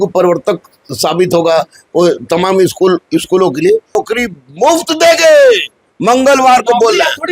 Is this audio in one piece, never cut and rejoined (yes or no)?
no